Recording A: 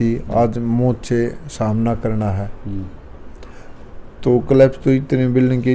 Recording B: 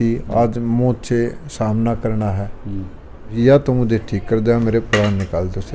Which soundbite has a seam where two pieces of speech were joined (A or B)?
B